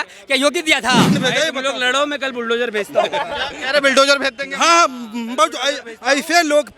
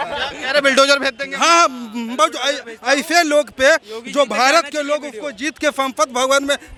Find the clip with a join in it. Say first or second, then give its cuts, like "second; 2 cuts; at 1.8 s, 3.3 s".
first; 1 cut; at 1.2 s